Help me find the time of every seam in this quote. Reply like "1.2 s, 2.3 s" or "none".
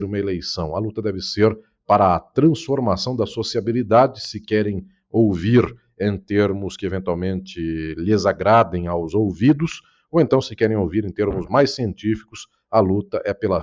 none